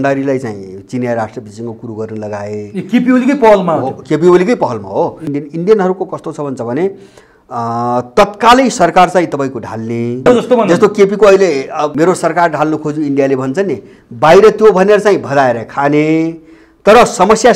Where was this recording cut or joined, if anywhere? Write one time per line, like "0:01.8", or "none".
0:05.3
0:10.2
0:11.9

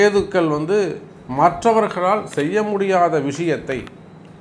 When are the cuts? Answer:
none

